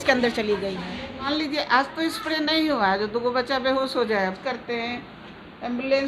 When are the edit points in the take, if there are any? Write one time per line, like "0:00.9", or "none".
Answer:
0:01.3
0:04.4